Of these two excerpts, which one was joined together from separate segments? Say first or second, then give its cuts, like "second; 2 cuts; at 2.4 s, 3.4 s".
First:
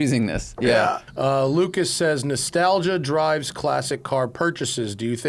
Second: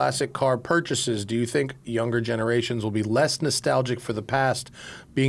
first; 1 cut; at 1.1 s